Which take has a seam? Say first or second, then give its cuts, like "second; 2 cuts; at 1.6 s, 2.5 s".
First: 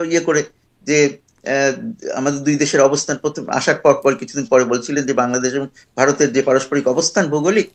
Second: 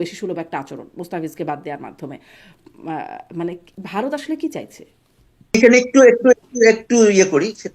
second; 1 cut; at 5.5 s